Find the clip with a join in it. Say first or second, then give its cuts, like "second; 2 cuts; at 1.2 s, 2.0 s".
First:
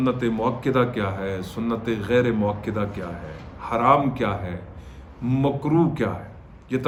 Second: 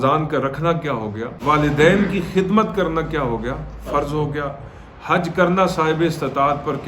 second; 1 cut; at 1.3 s